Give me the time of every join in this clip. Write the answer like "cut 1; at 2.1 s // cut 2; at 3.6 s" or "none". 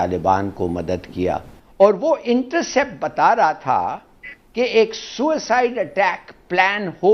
cut 1; at 1.6 s